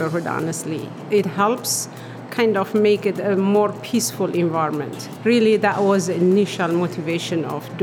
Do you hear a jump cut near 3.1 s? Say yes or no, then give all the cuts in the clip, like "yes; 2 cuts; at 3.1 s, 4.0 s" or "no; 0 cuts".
no; 1 cut; at 5.1 s